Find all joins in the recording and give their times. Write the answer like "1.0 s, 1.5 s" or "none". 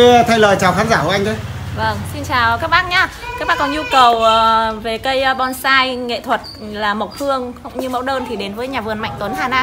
none